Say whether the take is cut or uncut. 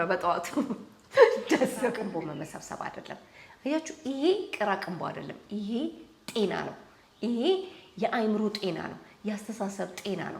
cut